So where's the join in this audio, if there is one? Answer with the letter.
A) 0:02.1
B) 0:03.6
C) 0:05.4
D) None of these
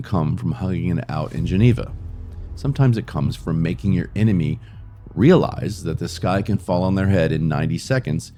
D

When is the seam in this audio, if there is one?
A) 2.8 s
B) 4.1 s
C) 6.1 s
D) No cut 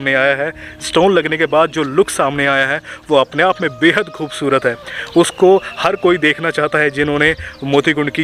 D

